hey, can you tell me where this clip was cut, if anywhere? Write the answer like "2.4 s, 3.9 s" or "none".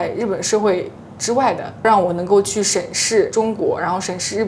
none

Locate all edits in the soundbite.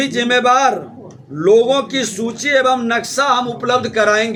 none

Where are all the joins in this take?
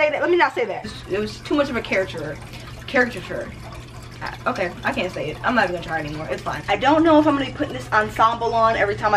0.9 s, 6.5 s

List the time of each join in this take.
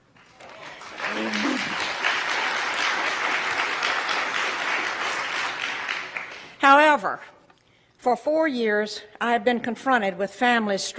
4.0 s

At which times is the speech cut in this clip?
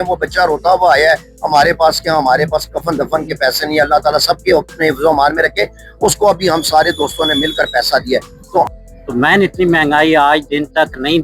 8.7 s

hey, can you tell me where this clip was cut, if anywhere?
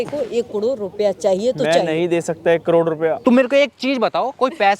3.2 s

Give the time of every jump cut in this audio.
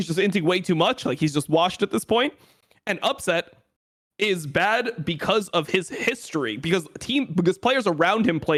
none

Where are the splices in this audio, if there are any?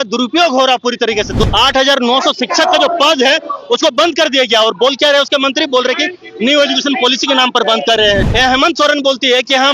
1.4 s, 8.3 s

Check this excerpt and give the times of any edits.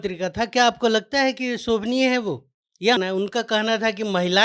3.0 s

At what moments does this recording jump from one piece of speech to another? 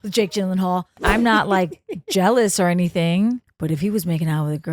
1.0 s, 3.5 s

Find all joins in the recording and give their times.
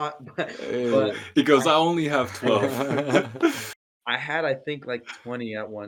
none

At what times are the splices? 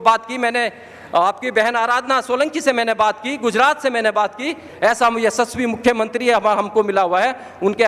4.7 s

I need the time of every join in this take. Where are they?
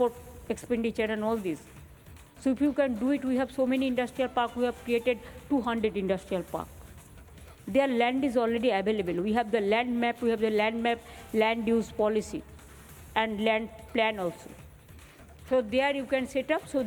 none

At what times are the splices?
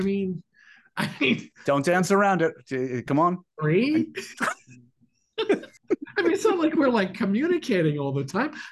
5.7 s

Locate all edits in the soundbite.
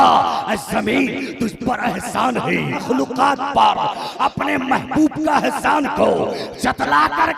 2.8 s

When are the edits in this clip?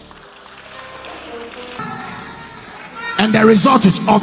1.8 s

